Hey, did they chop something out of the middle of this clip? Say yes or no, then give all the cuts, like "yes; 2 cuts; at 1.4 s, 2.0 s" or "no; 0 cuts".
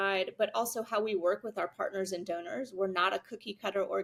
no; 0 cuts